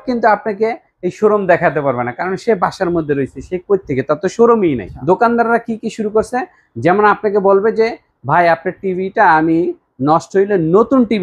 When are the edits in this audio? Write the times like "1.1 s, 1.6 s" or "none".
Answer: 4.9 s